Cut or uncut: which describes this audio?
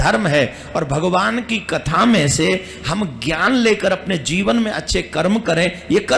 uncut